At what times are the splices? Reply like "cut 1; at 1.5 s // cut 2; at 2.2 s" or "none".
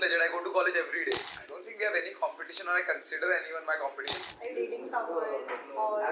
cut 1; at 1.3 s // cut 2; at 4.1 s